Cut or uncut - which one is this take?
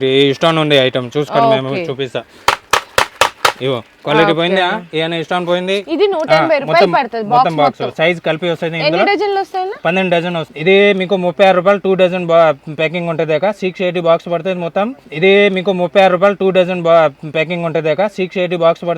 cut